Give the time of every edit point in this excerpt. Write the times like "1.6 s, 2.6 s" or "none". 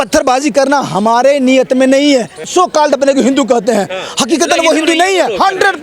2.4 s